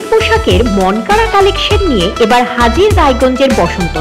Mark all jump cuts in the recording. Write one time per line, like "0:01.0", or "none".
none